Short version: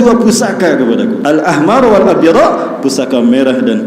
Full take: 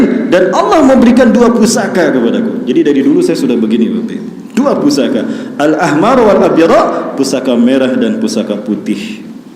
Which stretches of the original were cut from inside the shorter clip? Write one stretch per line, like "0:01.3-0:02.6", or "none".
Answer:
0:02.5-0:05.5